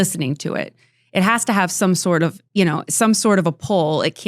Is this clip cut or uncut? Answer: cut